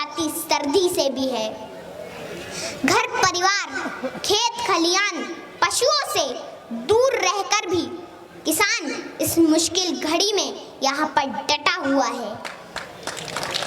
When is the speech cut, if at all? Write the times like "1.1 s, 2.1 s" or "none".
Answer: none